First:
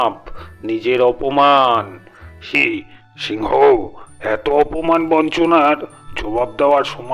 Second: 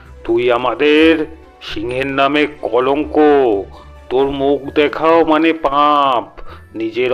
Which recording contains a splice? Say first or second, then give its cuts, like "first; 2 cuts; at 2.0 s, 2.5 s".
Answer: first; 1 cut; at 2.5 s